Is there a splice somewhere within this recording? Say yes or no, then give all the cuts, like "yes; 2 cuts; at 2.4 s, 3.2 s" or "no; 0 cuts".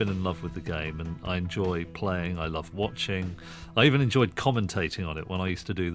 no; 0 cuts